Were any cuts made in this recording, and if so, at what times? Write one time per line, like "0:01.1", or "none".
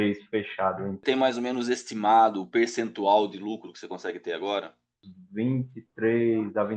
0:01.0
0:05.0

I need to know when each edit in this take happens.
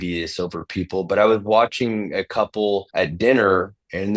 0:02.9

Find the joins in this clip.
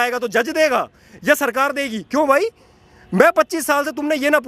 none

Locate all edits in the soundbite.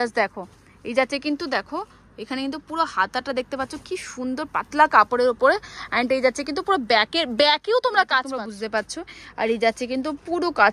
0:08.3

